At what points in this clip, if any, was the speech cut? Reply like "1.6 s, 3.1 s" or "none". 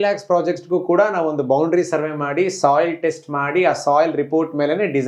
none